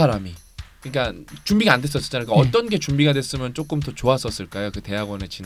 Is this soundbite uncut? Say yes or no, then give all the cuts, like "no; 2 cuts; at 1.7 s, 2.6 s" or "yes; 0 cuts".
yes; 0 cuts